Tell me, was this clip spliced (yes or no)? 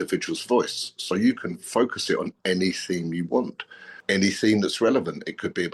no